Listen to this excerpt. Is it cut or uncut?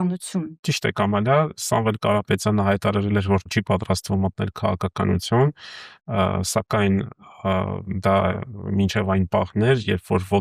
uncut